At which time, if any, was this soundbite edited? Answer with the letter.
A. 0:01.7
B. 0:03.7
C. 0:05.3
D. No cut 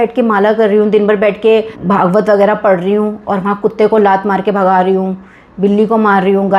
A